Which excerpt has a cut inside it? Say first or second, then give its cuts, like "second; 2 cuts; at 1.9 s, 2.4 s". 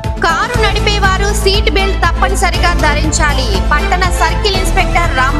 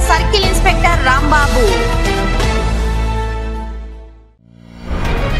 second; 1 cut; at 4.3 s